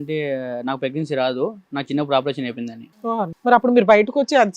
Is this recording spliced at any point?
yes; 1 cut; at 3.0 s

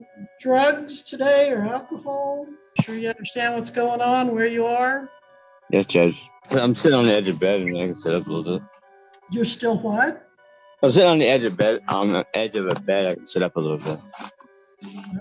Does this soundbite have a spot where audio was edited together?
yes; 2 cuts; at 2.5 s, 6.3 s

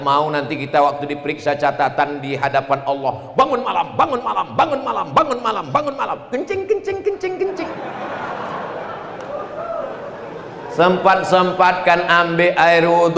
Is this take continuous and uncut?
yes; 0 cuts

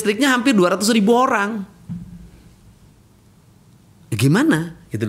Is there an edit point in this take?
no; 0 cuts

